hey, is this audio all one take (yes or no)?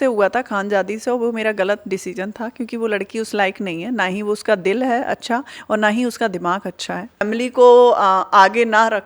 no